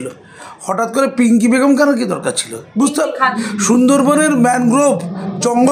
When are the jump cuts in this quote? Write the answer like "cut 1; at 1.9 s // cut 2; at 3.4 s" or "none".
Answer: cut 1; at 3.4 s